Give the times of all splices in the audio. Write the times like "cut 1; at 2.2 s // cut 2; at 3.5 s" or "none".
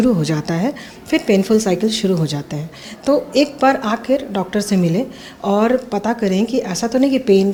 none